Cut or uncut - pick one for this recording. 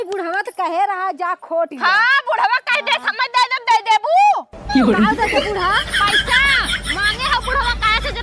uncut